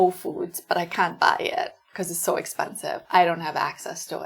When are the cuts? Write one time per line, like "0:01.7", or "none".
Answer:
none